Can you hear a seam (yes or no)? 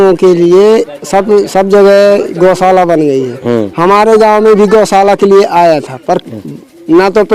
no